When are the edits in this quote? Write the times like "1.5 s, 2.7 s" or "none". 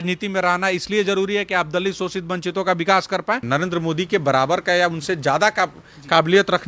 3.4 s